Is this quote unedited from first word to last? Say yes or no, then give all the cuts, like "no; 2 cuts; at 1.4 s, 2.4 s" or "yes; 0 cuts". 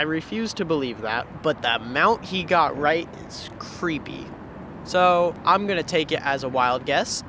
yes; 0 cuts